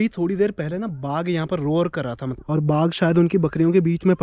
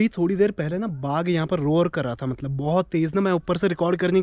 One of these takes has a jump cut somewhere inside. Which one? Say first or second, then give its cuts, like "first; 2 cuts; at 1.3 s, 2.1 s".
first; 1 cut; at 2.3 s